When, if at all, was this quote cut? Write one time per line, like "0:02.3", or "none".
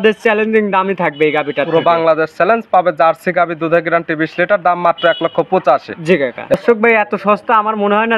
0:06.5